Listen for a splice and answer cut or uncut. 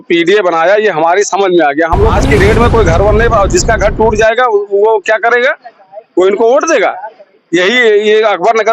cut